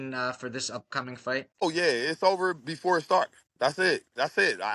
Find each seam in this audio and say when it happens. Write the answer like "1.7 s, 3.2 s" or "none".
1.5 s